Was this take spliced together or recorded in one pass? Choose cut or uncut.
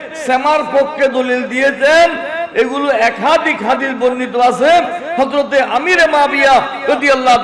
uncut